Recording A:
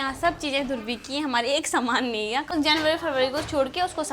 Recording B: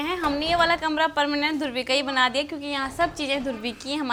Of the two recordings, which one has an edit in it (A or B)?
A